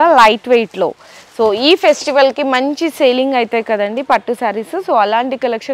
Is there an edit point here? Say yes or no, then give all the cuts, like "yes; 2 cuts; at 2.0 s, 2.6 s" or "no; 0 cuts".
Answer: no; 0 cuts